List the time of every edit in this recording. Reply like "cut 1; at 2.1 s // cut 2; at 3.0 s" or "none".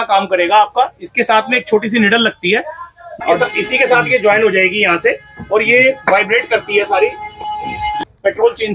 cut 1; at 3.1 s // cut 2; at 8.0 s